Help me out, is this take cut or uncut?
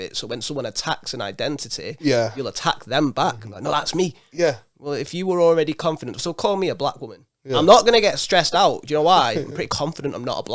uncut